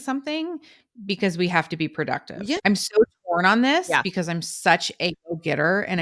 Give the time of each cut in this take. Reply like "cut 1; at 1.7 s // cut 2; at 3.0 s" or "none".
cut 1; at 2.6 s